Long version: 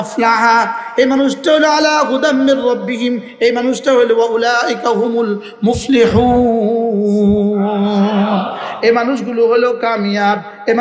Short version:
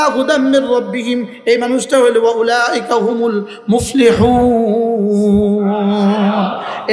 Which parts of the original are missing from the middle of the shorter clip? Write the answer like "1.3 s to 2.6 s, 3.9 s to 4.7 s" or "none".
none